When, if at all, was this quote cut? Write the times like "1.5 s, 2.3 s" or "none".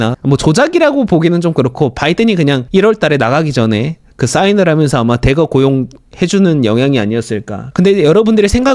2.6 s, 7.6 s